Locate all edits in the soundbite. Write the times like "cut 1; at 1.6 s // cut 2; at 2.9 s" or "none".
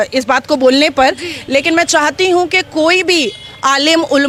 none